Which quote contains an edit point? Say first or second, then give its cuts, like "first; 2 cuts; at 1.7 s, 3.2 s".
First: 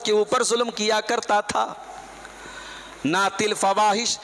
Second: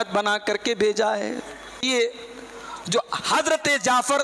second; 1 cut; at 1.8 s